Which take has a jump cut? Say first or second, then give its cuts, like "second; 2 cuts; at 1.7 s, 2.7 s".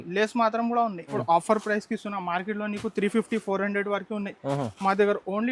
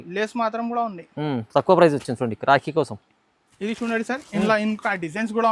first; 1 cut; at 1.0 s